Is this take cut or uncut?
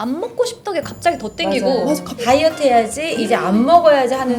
cut